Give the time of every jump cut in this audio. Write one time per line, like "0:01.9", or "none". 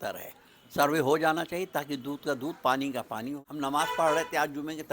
0:03.3